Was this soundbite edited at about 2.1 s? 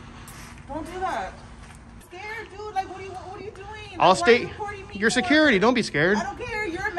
yes; 1 cut; at 2.1 s

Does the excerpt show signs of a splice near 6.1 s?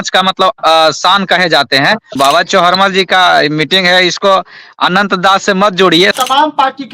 yes; 2 cuts; at 2.2 s, 6.1 s

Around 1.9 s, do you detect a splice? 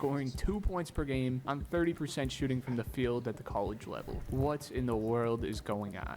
no; 1 cut; at 4.3 s

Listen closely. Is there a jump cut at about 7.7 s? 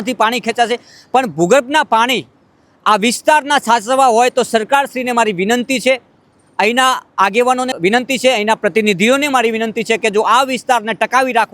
yes; 1 cut; at 7.7 s

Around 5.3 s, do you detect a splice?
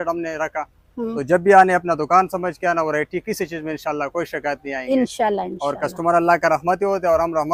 no; 0 cuts

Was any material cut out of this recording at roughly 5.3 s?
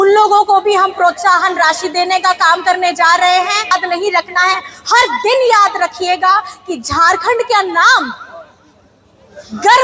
no; 1 cut; at 3.8 s

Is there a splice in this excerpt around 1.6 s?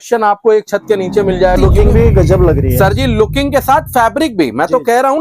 yes; 1 cut; at 1.6 s

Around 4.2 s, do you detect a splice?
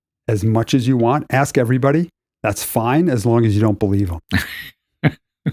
yes; 1 cut; at 4.2 s

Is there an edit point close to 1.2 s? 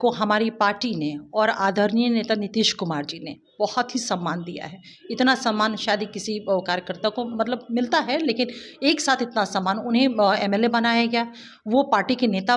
no; 0 cuts

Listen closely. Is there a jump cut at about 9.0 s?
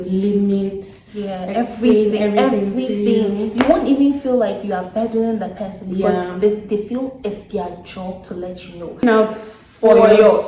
yes; 1 cut; at 9.0 s

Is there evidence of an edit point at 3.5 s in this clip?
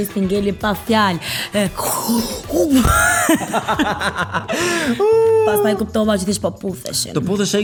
no; 0 cuts

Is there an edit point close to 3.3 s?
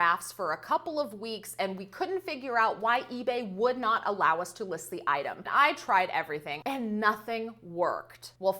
no; 2 cuts; at 5.5 s, 6.5 s

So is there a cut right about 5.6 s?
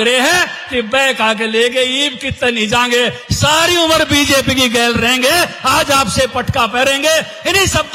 no; 0 cuts

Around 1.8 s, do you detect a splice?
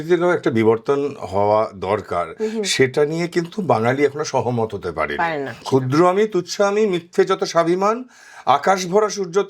no; 1 cut; at 5.6 s

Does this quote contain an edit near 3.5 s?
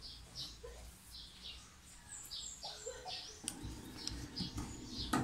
yes; 1 cut; at 3.5 s

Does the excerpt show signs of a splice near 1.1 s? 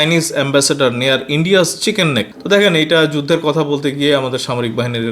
no; 1 cut; at 2.3 s

